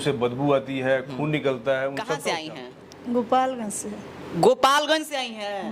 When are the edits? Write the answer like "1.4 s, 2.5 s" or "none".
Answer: 2.1 s